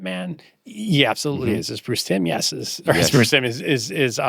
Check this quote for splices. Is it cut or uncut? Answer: uncut